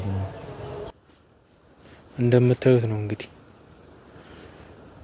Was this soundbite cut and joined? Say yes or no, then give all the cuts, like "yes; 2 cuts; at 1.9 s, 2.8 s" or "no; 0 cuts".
yes; 1 cut; at 0.9 s